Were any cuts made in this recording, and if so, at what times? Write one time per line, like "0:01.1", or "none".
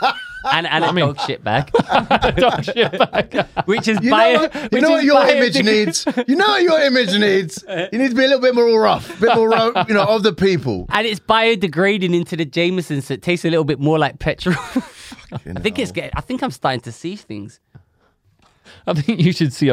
0:18.3